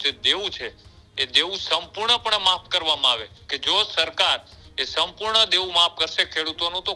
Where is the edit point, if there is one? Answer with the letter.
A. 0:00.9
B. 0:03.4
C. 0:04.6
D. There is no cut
B